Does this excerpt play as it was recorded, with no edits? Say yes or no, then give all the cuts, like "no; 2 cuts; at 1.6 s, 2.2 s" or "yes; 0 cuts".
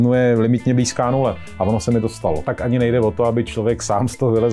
no; 1 cut; at 2.4 s